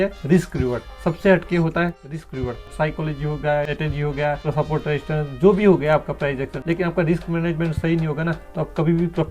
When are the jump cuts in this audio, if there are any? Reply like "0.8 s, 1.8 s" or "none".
2.6 s, 4.0 s, 6.5 s